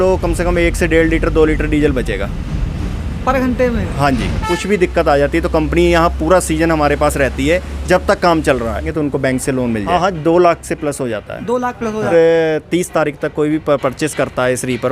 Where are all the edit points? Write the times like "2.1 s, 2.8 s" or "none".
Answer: 4.4 s, 8.9 s, 9.9 s, 12.1 s